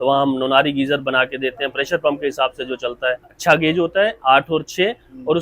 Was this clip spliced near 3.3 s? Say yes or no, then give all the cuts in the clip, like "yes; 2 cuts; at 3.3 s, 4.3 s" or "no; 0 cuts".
yes; 1 cut; at 3.3 s